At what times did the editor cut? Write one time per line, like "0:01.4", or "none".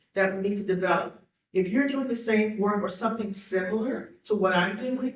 none